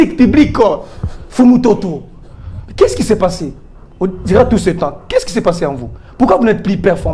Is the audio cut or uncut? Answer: uncut